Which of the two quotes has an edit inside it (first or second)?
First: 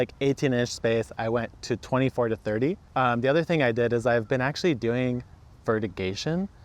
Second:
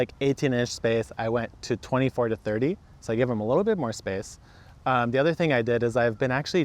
first